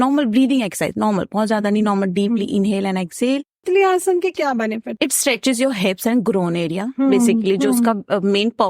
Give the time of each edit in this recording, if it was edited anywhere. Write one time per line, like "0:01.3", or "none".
0:03.6
0:04.9